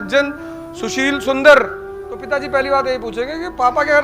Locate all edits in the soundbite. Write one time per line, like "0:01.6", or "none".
0:02.6

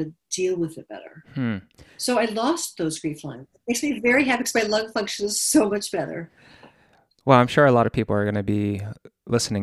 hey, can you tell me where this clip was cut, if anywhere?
none

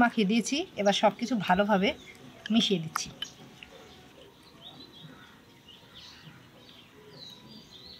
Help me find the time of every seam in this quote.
none

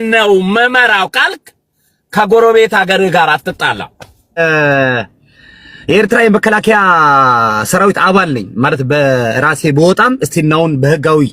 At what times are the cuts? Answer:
0:04.4

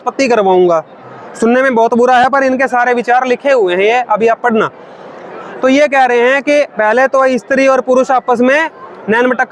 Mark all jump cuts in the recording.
none

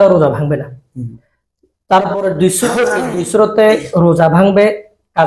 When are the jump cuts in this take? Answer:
none

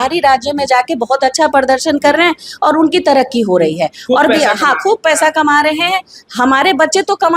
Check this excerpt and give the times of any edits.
none

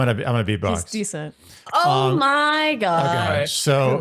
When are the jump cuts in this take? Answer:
none

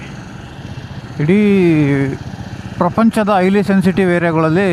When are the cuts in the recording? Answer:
none

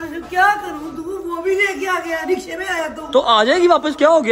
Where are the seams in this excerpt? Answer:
none

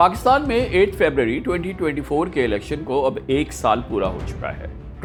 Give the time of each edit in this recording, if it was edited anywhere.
none

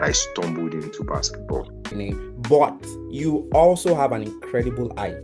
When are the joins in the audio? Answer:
0:01.9

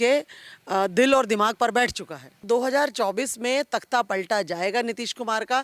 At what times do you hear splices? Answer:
0:02.4

